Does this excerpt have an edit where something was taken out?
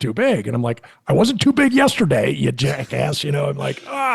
no; 0 cuts

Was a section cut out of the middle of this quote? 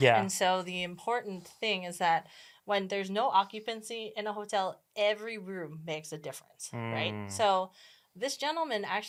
no; 0 cuts

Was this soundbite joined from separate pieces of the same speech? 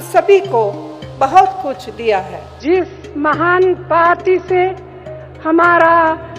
yes; 1 cut; at 2.6 s

